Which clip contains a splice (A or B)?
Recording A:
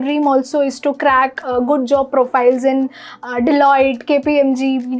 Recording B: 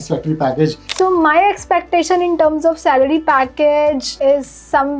B